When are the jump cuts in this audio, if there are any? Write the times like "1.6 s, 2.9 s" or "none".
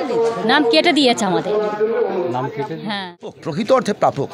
3.4 s